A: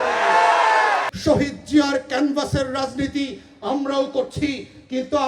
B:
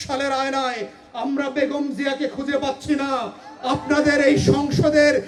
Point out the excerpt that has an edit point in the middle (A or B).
A